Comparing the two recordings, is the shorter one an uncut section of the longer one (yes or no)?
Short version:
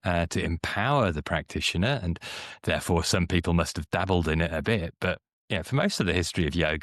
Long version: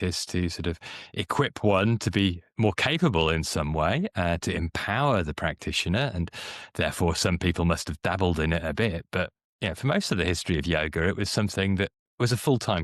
yes